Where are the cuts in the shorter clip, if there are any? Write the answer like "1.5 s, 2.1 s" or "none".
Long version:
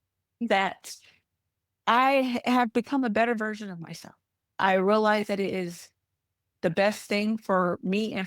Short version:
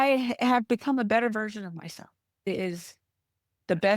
2.5 s